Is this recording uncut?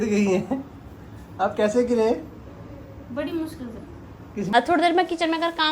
no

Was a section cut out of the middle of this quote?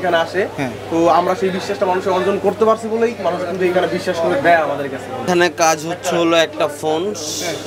yes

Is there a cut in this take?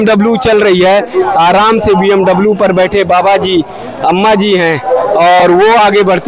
no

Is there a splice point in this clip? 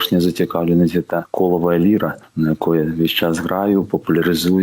yes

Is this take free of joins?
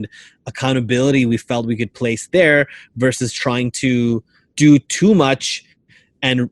no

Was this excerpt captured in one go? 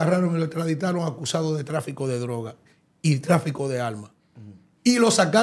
yes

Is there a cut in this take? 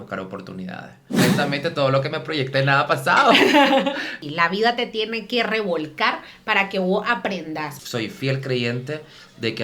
yes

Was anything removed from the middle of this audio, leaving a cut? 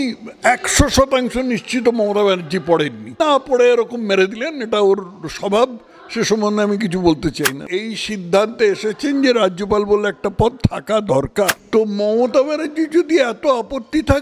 yes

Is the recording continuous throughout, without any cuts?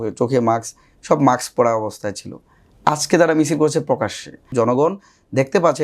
no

